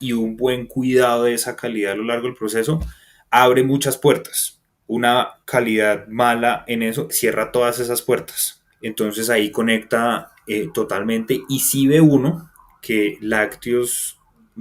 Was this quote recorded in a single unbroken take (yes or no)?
yes